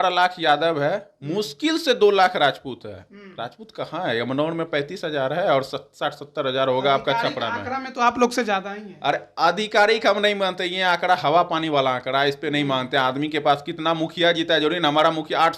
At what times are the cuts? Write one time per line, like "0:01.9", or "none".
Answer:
none